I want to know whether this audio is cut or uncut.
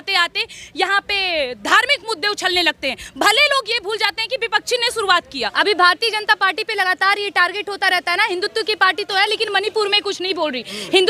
cut